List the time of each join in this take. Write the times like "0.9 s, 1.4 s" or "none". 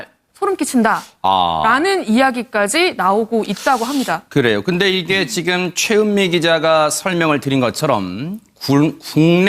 8.5 s